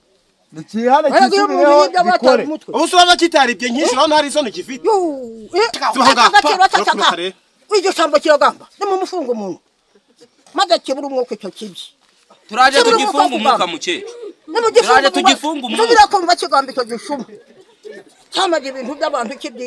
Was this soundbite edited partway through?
yes; 1 cut; at 5.8 s

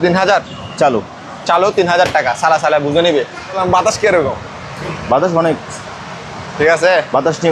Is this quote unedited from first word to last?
no; 1 cut; at 3.6 s

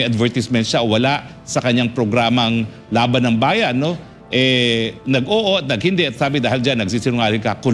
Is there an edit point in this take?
no; 0 cuts

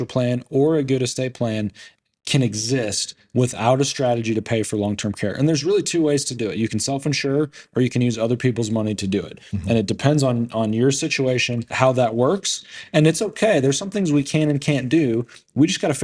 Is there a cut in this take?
yes; 1 cut; at 11.7 s

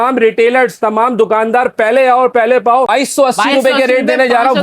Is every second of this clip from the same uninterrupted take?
no; 1 cut; at 2.9 s

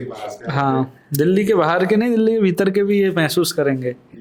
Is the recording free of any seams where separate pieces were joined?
yes; 0 cuts

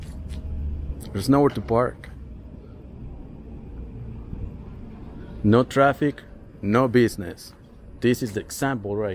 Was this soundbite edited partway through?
no; 0 cuts

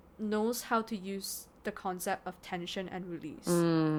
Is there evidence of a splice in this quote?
no; 0 cuts

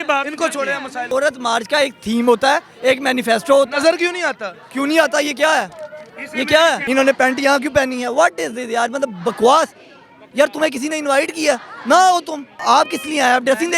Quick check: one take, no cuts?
no; 3 cuts; at 1.1 s, 6.8 s, 12.6 s

